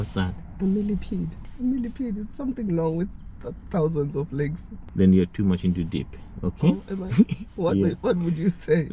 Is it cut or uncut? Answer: cut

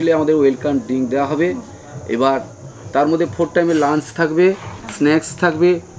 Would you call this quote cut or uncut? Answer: uncut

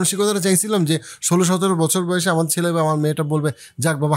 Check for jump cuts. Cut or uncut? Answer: uncut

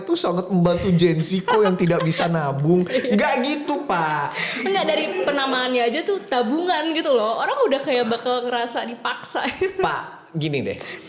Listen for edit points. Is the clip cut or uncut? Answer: uncut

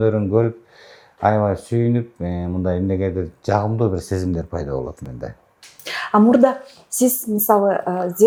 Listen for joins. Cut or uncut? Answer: uncut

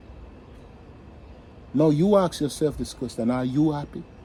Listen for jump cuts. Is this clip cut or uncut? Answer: uncut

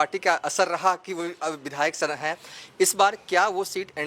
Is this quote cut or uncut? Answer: uncut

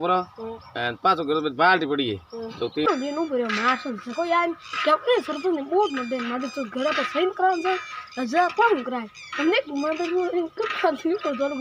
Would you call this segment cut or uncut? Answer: cut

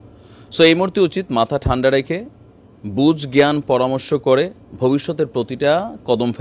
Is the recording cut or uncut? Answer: uncut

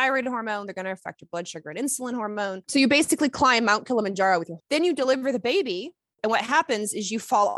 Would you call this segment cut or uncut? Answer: cut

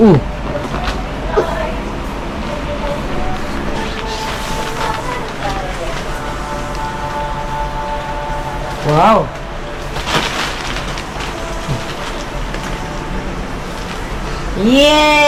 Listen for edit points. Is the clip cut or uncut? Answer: uncut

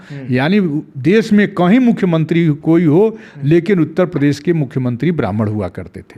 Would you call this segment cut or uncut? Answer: uncut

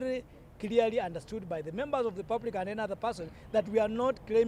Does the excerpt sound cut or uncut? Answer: uncut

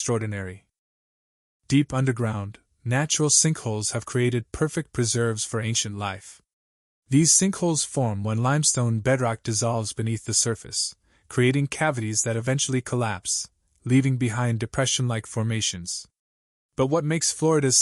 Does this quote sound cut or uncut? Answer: uncut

